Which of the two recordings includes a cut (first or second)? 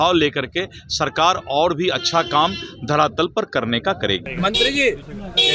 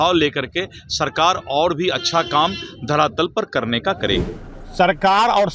second